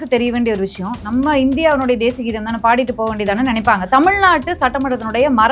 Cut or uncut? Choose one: cut